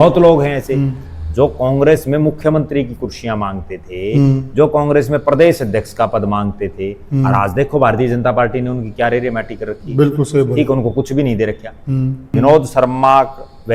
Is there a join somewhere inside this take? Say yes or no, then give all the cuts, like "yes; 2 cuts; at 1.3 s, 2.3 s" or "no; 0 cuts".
yes; 1 cut; at 12.2 s